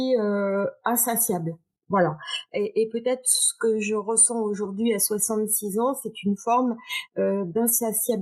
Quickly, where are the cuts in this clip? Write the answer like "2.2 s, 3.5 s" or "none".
none